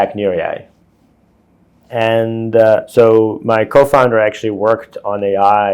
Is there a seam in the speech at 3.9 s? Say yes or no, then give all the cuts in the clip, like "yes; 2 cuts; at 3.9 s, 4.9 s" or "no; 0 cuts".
no; 1 cut; at 1.8 s